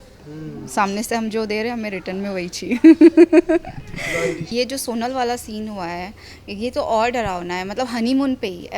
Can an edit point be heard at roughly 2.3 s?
no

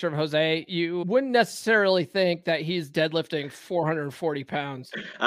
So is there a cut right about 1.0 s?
yes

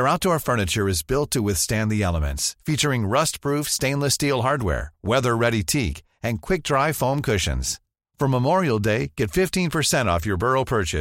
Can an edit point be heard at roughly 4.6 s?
no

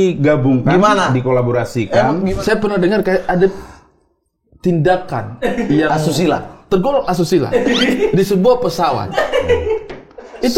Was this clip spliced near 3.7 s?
no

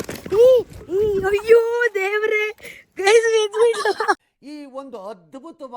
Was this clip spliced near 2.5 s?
no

